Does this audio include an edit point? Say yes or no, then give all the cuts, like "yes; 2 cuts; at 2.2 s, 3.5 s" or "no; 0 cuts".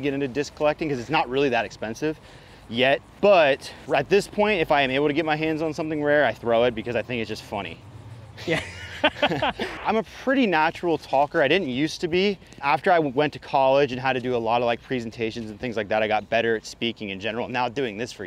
yes; 4 cuts; at 3.1 s, 3.7 s, 9.7 s, 12.6 s